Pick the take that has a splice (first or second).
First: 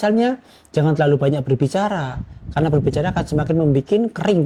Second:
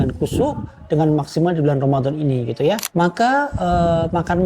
second